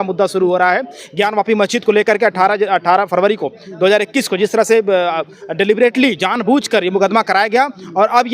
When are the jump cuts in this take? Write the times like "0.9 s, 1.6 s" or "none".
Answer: none